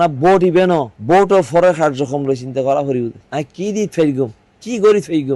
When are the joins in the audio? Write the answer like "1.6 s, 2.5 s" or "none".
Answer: none